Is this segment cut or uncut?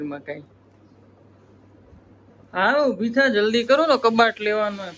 uncut